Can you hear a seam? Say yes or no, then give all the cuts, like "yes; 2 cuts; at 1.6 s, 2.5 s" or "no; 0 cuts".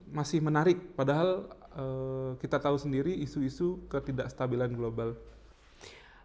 no; 0 cuts